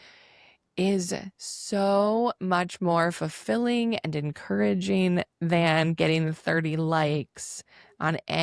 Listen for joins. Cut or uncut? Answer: uncut